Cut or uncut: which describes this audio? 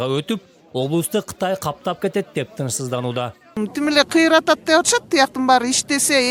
uncut